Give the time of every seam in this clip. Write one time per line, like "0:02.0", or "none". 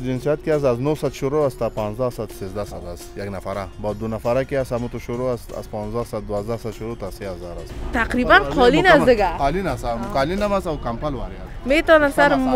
0:07.8